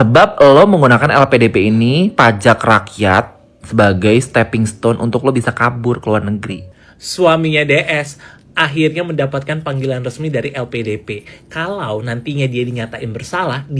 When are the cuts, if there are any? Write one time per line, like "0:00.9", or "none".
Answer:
0:06.6